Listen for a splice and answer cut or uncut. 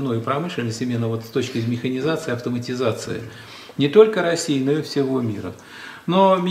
uncut